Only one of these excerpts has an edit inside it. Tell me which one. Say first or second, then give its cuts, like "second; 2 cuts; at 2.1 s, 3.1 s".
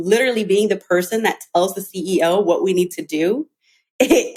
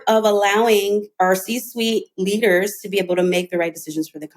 second; 1 cut; at 1.1 s